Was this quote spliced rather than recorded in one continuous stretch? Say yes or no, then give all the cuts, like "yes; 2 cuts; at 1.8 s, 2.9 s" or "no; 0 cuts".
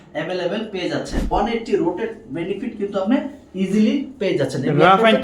yes; 1 cut; at 1.3 s